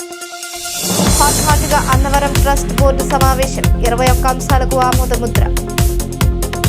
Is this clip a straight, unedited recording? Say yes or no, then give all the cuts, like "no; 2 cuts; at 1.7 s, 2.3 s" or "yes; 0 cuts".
yes; 0 cuts